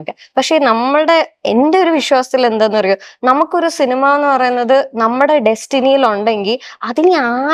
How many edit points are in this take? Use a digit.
0